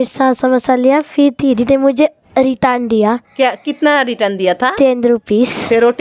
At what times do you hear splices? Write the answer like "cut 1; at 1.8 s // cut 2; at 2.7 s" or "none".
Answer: none